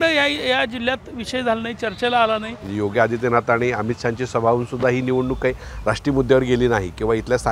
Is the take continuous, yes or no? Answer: no